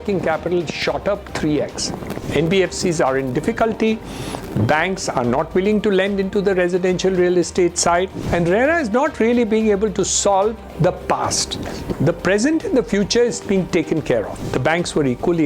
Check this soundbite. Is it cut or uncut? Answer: cut